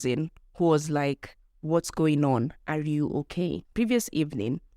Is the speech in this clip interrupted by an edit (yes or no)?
yes